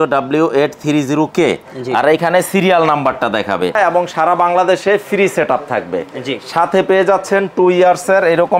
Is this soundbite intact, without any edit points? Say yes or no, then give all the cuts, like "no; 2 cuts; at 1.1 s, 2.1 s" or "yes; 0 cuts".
no; 1 cut; at 3.8 s